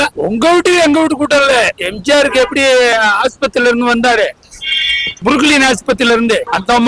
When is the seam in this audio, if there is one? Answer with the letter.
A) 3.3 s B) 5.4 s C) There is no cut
C